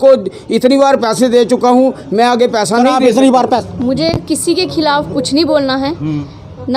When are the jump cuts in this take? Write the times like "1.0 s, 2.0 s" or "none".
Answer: 3.6 s